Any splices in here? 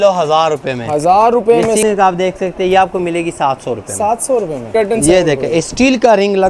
yes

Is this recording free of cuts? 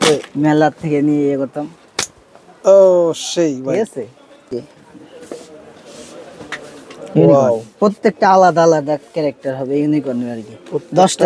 no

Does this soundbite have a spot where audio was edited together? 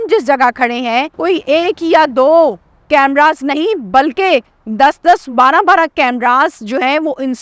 yes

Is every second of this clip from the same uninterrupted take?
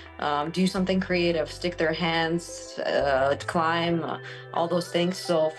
yes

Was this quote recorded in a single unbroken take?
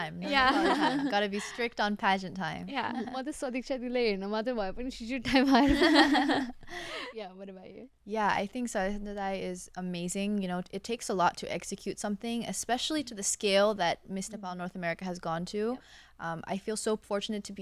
yes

